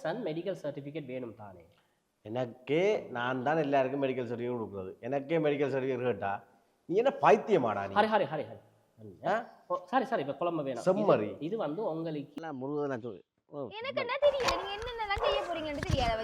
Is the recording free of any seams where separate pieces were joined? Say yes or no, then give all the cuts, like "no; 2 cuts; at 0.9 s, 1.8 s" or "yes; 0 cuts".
no; 1 cut; at 12.3 s